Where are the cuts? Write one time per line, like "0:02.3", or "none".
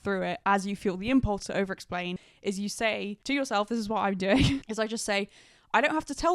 0:02.2
0:03.2